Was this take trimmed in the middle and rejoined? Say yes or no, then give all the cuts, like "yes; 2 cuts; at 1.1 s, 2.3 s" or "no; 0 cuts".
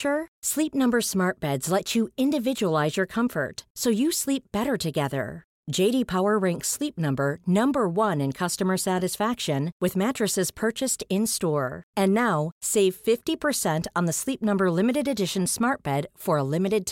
no; 0 cuts